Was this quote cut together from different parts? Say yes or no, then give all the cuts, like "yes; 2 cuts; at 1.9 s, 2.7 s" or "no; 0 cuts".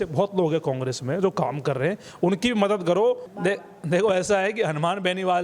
yes; 1 cut; at 3.3 s